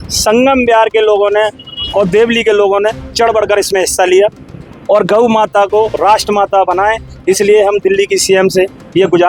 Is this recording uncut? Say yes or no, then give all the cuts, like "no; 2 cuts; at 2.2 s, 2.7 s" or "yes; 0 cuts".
yes; 0 cuts